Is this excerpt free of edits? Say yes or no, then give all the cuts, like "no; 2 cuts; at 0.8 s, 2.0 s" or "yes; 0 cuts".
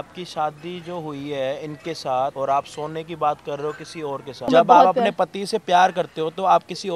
no; 2 cuts; at 2.3 s, 4.5 s